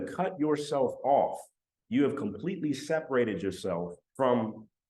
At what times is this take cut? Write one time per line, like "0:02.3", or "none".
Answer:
0:04.0